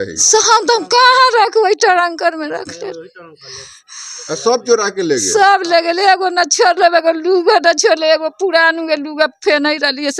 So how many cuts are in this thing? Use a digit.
0